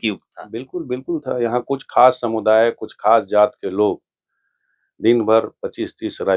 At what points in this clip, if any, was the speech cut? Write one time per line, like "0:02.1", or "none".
none